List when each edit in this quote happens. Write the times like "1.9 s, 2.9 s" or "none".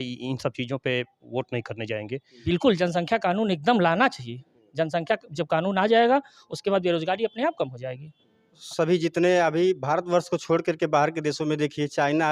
2.3 s, 8.6 s